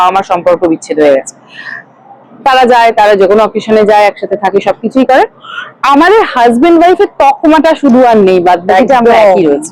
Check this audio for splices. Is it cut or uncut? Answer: uncut